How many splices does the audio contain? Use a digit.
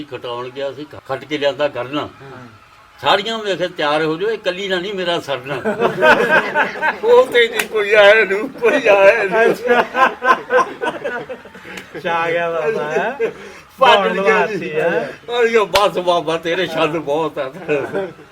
1